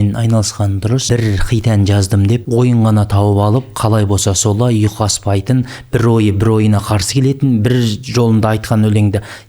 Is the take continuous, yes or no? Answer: no